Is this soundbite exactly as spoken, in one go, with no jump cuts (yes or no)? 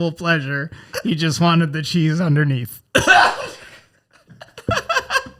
yes